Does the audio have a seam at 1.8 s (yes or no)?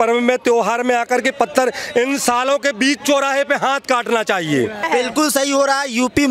no